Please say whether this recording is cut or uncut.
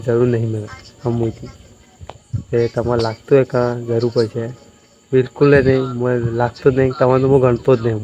uncut